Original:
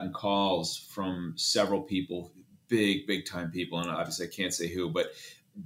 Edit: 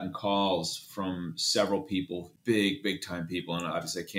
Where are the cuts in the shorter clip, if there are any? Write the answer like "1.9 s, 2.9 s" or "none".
2.2 s